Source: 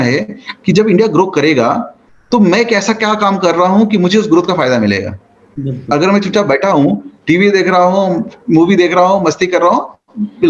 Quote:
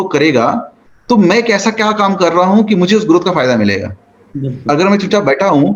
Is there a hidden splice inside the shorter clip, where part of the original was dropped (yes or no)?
no